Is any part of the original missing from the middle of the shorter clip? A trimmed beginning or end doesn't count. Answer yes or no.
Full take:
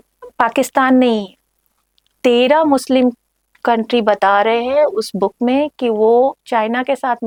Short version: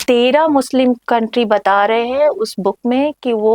yes